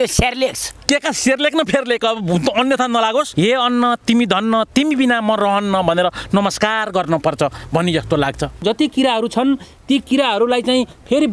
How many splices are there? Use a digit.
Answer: 2